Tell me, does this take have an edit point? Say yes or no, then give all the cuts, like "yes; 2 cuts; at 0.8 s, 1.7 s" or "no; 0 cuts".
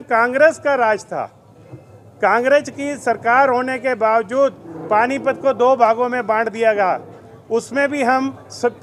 no; 0 cuts